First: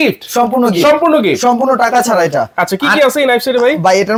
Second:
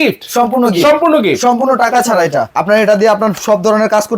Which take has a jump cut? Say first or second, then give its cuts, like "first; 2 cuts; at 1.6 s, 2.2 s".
second; 1 cut; at 2.5 s